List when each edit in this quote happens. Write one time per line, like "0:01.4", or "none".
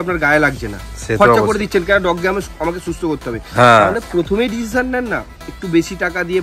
none